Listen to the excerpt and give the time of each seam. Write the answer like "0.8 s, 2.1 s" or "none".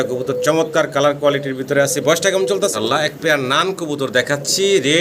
2.7 s